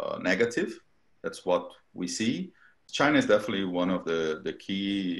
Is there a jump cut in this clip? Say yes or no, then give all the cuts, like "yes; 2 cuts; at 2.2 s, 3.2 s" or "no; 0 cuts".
yes; 1 cut; at 2.8 s